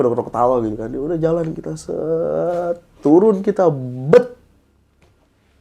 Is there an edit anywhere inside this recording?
no; 0 cuts

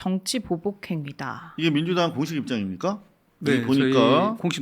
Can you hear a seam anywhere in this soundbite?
no; 0 cuts

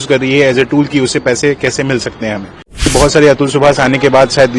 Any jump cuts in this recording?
yes; 1 cut; at 2.9 s

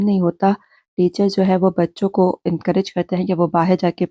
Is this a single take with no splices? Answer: yes; 0 cuts

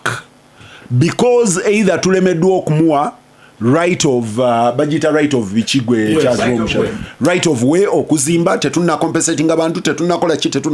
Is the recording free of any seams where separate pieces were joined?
yes; 0 cuts

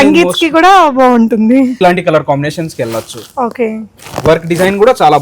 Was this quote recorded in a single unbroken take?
no; 1 cut; at 1.8 s

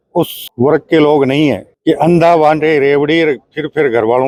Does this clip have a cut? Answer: no; 0 cuts

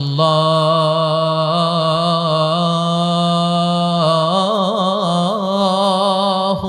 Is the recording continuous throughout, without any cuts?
yes; 0 cuts

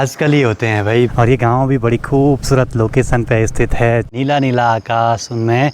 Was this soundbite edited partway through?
yes; 2 cuts; at 1.1 s, 4.1 s

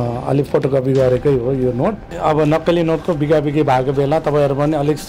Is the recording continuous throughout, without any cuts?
no; 1 cut; at 2.1 s

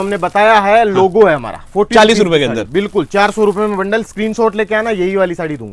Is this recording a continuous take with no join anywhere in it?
yes; 0 cuts

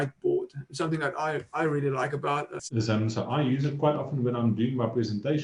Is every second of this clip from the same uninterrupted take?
no; 1 cut; at 2.5 s

